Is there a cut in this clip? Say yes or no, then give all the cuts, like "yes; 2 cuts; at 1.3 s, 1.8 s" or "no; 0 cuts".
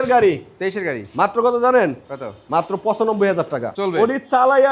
yes; 1 cut; at 3.7 s